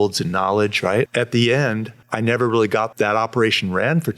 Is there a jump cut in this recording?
yes; 3 cuts; at 1.1 s, 2.0 s, 2.9 s

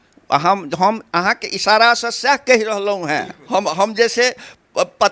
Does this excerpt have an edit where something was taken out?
yes; 1 cut; at 3.4 s

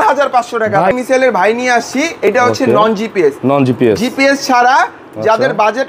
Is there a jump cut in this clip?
yes; 1 cut; at 0.9 s

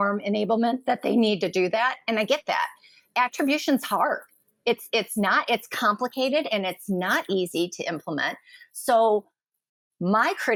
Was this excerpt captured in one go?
yes; 0 cuts

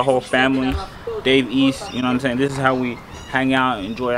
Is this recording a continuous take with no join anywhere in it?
yes; 0 cuts

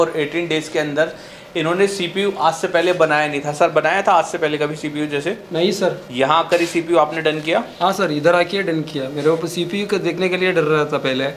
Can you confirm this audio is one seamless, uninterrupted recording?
yes; 0 cuts

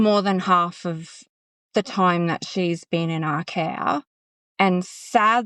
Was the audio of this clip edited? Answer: no; 0 cuts

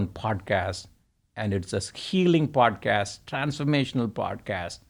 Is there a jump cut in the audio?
no; 0 cuts

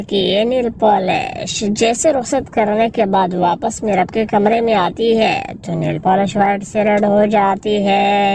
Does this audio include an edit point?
no; 0 cuts

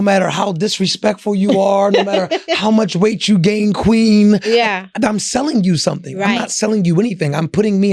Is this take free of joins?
yes; 0 cuts

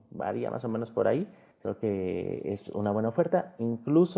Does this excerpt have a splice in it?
yes; 1 cut; at 1.4 s

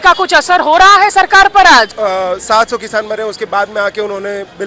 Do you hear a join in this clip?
yes; 1 cut; at 1.9 s

